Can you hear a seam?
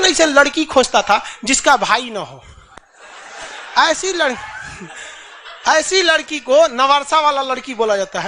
no; 0 cuts

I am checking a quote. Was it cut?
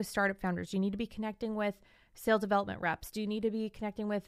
no; 0 cuts

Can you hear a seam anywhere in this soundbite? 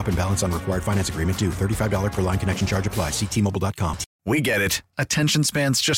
yes; 1 cut; at 4.1 s

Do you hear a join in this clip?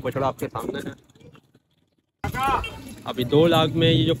yes; 1 cut; at 2.1 s

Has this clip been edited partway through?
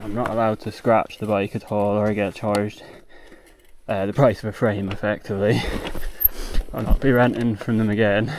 no; 0 cuts

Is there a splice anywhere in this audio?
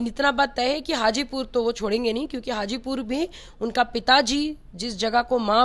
no; 0 cuts

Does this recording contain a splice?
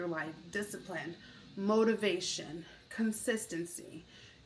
no; 0 cuts

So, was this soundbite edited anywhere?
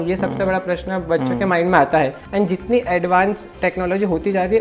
yes; 1 cut; at 2.2 s

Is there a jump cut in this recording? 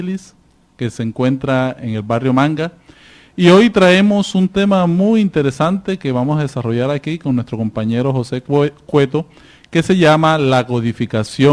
no; 0 cuts

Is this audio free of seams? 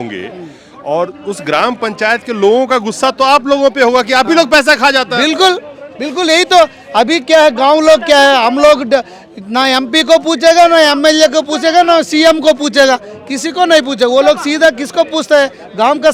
yes; 0 cuts

